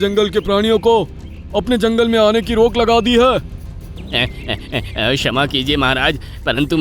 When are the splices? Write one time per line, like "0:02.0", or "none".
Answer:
0:04.0